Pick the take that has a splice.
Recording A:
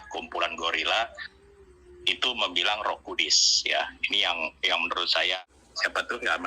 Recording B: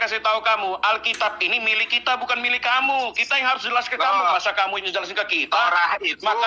A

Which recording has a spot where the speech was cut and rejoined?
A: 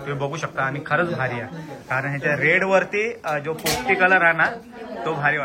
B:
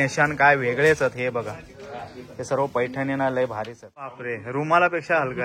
B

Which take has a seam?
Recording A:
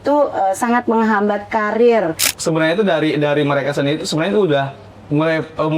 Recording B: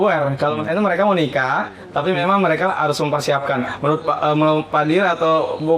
A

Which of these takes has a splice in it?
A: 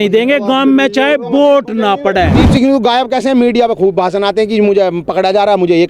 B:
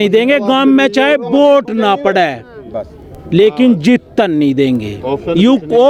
A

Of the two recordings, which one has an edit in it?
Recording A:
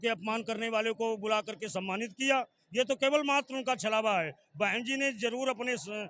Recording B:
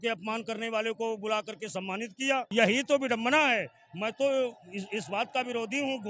B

